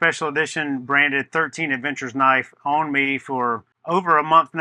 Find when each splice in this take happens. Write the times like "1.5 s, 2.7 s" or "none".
3.7 s